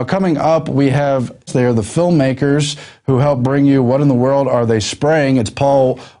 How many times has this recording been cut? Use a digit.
1